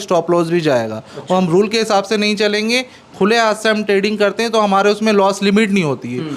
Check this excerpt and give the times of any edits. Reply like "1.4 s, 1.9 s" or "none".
none